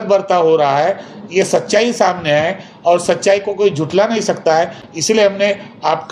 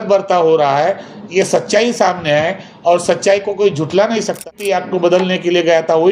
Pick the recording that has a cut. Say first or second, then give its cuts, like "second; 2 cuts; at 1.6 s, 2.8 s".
second; 1 cut; at 4.5 s